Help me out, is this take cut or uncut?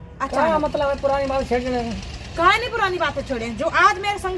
uncut